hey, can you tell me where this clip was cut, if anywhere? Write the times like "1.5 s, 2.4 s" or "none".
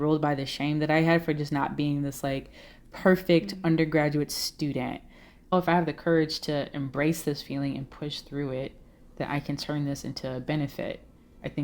5.5 s